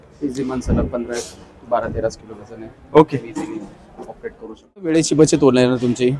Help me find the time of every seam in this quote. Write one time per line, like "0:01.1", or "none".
0:04.9